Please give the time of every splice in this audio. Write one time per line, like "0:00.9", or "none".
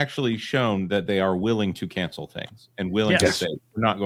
none